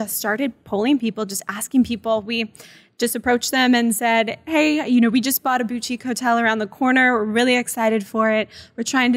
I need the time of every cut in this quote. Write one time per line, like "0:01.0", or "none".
none